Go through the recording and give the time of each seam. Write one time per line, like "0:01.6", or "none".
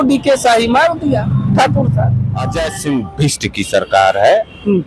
0:02.6